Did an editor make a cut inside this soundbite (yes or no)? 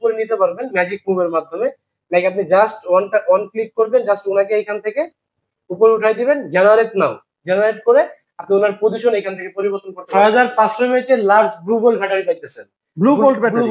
yes